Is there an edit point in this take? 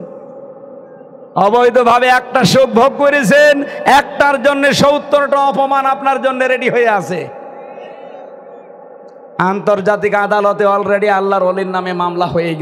yes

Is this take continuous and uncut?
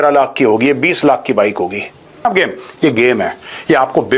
no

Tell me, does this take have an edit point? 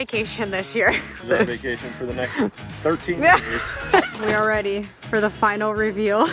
yes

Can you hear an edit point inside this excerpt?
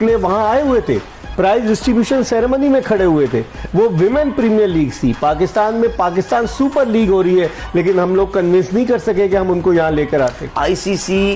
yes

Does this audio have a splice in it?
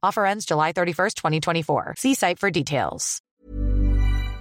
yes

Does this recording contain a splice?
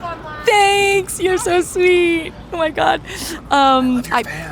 no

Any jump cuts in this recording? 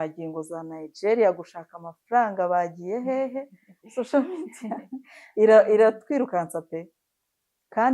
no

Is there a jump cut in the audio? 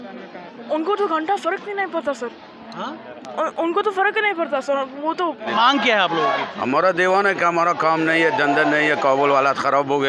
yes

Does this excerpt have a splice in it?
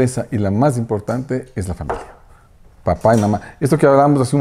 no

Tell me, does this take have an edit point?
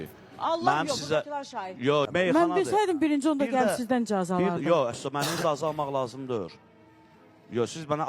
yes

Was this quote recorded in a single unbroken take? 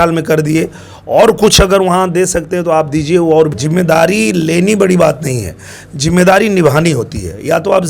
no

